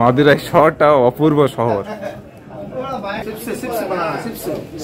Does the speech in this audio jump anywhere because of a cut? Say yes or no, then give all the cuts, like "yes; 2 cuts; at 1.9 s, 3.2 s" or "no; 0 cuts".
yes; 1 cut; at 3.2 s